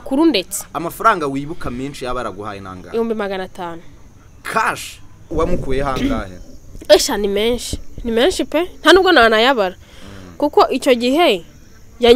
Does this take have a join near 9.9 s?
no; 1 cut; at 5.3 s

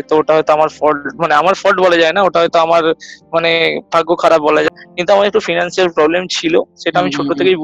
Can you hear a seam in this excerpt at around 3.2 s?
no; 2 cuts; at 4.7 s, 6.6 s

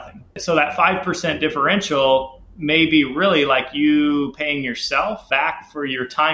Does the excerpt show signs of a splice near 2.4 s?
no; 1 cut; at 5.2 s

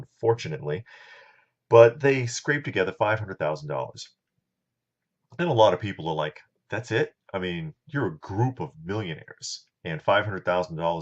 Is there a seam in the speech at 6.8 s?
yes; 1 cut; at 6.8 s

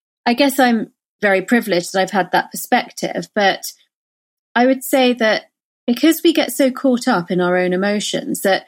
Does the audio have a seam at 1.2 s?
yes; 1 cut; at 1.2 s

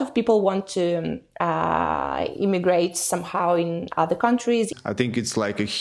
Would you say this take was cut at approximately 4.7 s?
yes; 1 cut; at 4.7 s

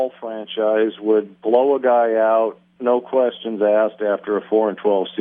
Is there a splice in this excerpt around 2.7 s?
yes; 1 cut; at 2.7 s

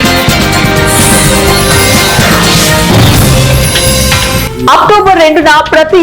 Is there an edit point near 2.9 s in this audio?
no; 1 cut; at 4.4 s

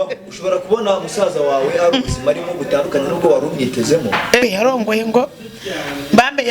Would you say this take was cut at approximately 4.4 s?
yes; 1 cut; at 4.4 s

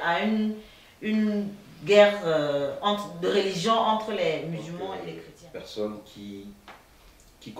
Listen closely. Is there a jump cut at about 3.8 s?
no; 1 cut; at 5.0 s

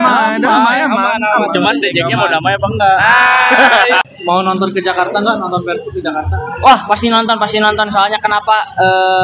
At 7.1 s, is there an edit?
no; 1 cut; at 4.0 s

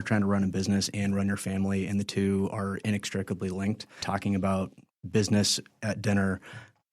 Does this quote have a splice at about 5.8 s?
no; 1 cut; at 4.0 s

